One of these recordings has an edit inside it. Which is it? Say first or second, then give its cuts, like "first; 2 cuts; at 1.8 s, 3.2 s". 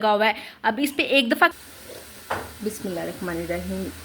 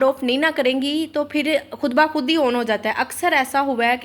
first; 1 cut; at 1.5 s